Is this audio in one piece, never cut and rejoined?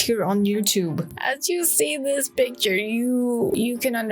no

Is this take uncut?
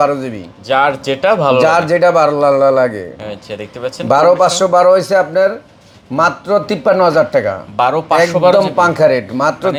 yes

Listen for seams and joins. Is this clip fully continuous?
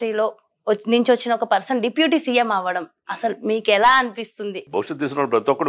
no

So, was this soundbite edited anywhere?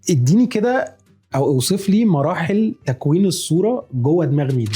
no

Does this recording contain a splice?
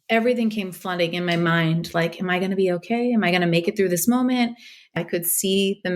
yes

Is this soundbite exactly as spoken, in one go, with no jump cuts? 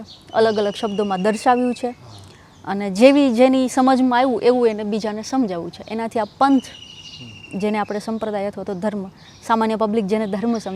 yes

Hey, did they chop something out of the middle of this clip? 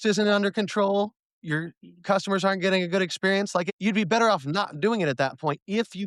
yes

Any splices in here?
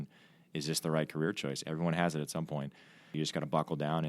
yes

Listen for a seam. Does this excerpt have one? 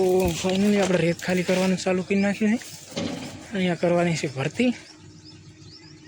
no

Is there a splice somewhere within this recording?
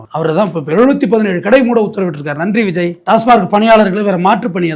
yes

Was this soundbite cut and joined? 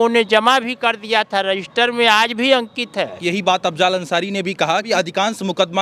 yes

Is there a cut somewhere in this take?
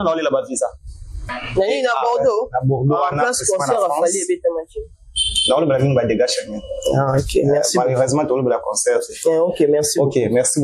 yes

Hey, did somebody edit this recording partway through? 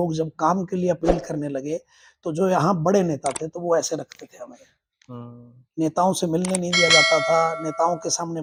no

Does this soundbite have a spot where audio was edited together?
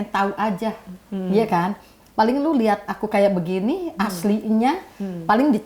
no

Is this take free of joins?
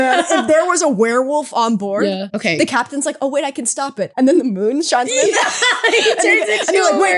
no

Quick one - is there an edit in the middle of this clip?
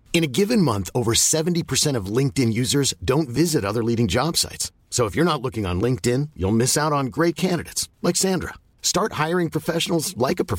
no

